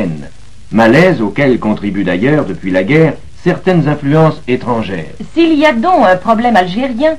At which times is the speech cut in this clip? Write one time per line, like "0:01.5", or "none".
0:06.2